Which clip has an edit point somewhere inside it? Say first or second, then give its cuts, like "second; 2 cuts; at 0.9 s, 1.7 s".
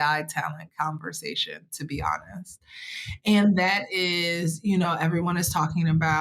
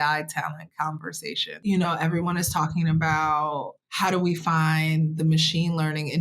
second; 2 cuts; at 1.6 s, 3.8 s